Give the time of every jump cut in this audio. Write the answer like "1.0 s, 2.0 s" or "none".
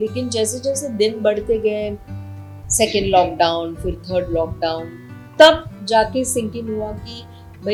none